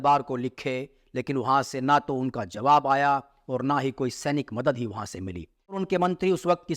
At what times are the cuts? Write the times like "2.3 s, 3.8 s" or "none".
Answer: 5.8 s